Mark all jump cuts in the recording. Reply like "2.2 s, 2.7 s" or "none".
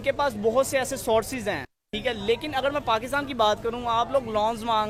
none